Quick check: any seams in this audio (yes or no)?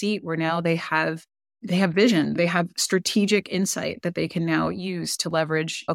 no